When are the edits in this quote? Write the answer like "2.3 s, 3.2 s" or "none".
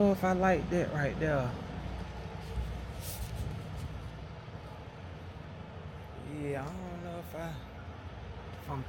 none